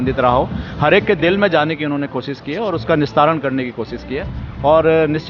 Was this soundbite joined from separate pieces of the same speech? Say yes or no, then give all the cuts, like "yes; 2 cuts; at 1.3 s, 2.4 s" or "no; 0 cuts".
no; 0 cuts